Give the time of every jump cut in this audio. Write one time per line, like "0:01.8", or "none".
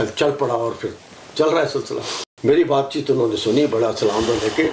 0:02.0